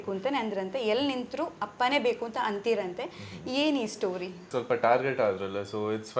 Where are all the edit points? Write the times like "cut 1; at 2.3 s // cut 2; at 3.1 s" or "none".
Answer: cut 1; at 4.4 s